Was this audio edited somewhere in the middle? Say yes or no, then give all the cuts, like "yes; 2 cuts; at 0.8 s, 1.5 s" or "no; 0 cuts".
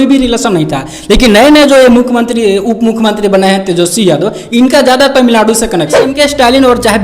yes; 1 cut; at 6.1 s